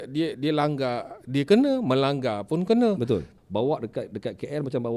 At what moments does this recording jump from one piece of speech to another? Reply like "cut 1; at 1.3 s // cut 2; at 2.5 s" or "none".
cut 1; at 3.3 s